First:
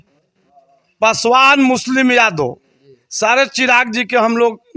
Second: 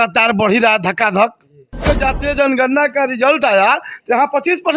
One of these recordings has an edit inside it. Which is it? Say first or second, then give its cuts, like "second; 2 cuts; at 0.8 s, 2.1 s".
second; 1 cut; at 1.8 s